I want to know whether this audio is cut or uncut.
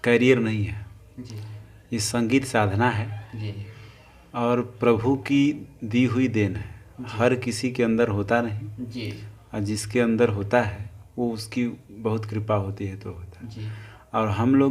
uncut